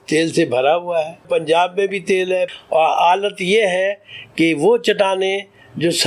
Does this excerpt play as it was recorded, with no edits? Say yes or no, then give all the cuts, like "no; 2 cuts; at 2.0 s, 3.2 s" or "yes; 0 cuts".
no; 2 cuts; at 1.2 s, 2.5 s